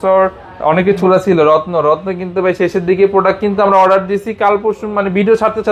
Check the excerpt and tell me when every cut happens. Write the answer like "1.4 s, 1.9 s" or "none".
1.0 s